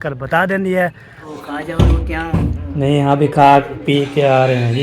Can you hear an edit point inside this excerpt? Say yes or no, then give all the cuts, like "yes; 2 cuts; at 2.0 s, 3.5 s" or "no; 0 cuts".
yes; 1 cut; at 1.3 s